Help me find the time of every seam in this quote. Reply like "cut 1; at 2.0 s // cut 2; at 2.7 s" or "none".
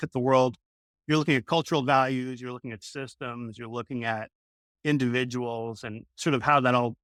none